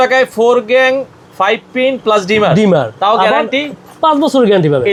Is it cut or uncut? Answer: uncut